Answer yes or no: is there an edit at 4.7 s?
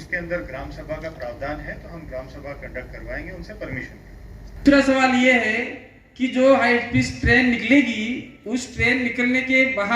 yes